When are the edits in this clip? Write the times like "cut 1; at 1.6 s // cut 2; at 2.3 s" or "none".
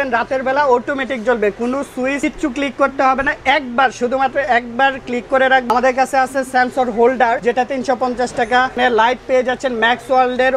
cut 1; at 2.2 s // cut 2; at 5.7 s // cut 3; at 7.4 s // cut 4; at 8.7 s